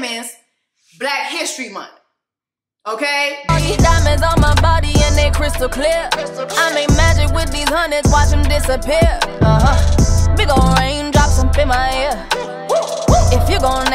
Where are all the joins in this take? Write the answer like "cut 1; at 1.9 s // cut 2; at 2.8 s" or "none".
cut 1; at 3.4 s